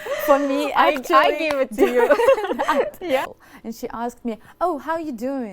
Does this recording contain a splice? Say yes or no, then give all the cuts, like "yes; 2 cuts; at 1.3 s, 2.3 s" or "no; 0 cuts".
yes; 1 cut; at 3.2 s